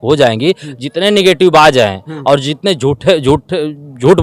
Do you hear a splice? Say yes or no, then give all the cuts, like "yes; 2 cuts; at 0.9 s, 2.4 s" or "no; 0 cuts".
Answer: no; 0 cuts